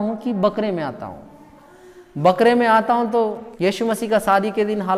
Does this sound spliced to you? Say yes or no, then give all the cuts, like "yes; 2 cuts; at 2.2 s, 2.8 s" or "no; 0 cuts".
yes; 1 cut; at 3.4 s